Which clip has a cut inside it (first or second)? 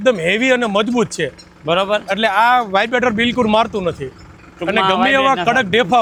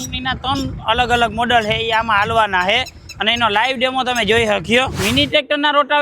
second